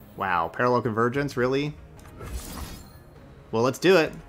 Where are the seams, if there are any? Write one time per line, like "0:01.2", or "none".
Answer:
0:01.9